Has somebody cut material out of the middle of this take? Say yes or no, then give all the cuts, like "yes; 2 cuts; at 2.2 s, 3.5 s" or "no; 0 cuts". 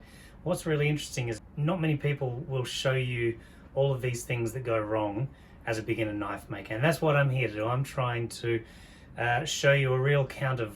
yes; 1 cut; at 1.5 s